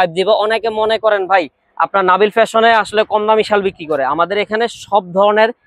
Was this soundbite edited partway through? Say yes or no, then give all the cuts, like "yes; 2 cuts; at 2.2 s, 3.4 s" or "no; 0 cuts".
no; 0 cuts